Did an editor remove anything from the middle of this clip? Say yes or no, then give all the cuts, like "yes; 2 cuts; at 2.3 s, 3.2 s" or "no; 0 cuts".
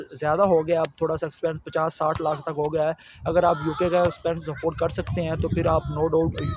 no; 0 cuts